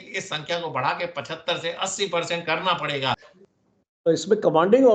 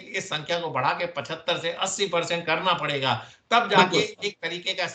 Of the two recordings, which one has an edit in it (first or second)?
first